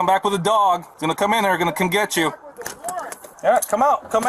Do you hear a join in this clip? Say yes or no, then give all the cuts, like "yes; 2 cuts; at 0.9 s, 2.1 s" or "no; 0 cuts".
yes; 2 cuts; at 0.9 s, 3.2 s